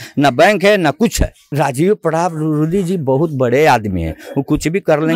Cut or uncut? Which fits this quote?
cut